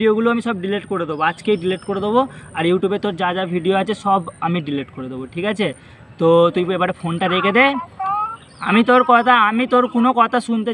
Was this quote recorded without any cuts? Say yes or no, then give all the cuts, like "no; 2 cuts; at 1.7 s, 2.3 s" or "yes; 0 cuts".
yes; 0 cuts